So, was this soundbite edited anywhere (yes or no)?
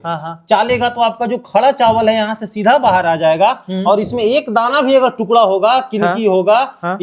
no